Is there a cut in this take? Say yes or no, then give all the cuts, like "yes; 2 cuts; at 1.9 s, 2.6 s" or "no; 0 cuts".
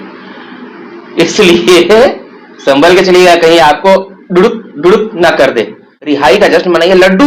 yes; 1 cut; at 6.3 s